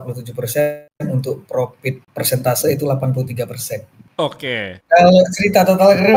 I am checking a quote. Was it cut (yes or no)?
yes